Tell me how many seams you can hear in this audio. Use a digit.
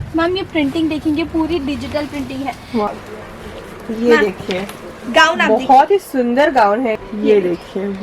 2